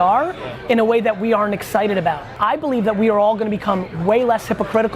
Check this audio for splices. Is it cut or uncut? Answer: cut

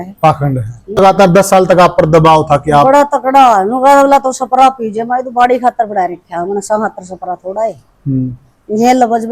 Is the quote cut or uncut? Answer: cut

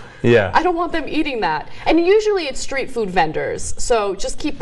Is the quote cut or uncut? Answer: uncut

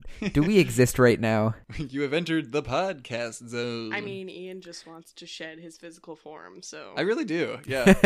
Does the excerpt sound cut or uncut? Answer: cut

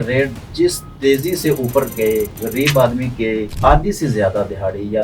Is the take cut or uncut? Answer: cut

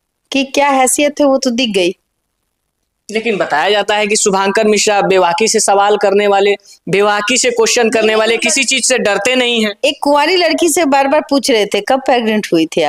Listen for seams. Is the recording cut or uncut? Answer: uncut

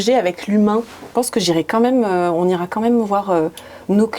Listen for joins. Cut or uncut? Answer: cut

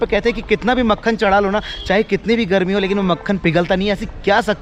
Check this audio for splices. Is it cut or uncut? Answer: uncut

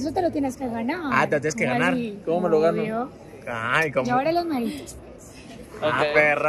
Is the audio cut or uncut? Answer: uncut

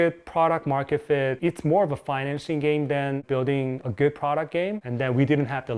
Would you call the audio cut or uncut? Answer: cut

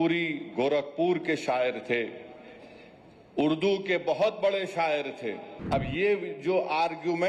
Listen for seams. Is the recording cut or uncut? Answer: cut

